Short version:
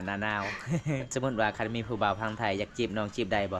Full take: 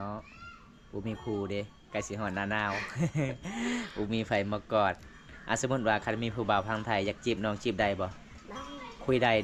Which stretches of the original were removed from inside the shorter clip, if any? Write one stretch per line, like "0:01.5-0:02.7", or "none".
0:03.4-0:05.6